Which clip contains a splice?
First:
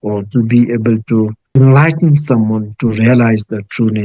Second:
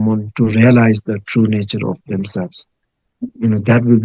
first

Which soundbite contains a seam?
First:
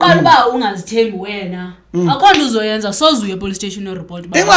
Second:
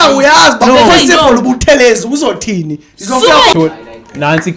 second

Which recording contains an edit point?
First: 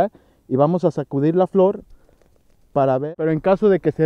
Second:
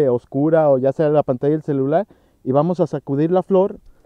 first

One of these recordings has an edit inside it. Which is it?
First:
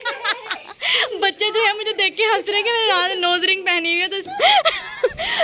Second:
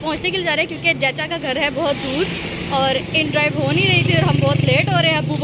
first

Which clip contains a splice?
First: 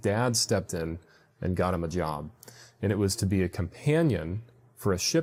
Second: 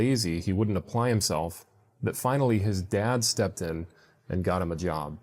second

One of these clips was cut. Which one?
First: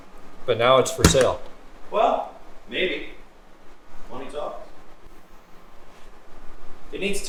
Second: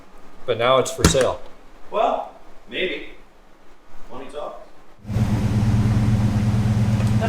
second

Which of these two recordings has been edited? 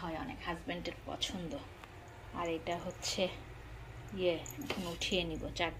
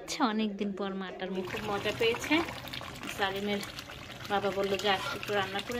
second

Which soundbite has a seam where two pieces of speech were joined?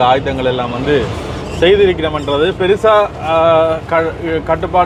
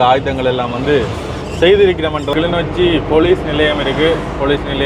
second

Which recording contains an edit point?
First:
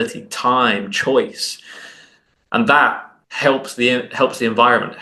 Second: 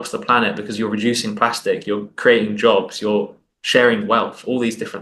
first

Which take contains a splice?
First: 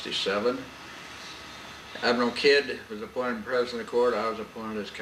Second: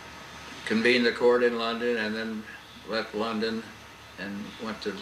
second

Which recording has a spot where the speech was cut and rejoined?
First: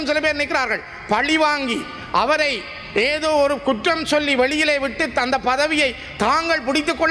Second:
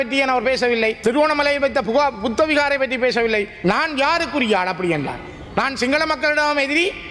second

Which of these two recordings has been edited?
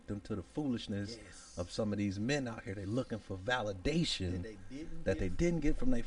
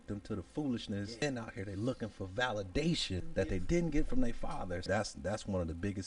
second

